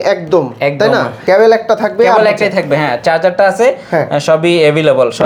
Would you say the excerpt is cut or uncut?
uncut